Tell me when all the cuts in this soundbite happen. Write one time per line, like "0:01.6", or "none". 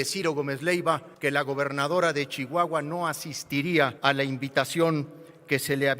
0:01.1
0:04.0